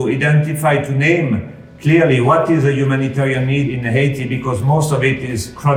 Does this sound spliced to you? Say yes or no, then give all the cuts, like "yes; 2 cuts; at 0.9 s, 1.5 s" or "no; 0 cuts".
yes; 1 cut; at 3.7 s